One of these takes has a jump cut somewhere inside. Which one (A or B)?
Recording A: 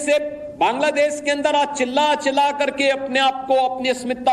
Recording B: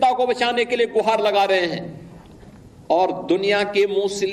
A